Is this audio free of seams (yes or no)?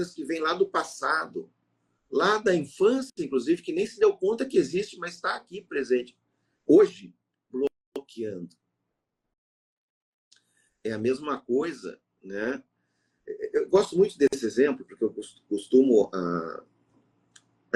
yes